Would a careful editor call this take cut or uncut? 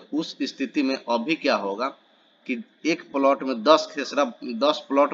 uncut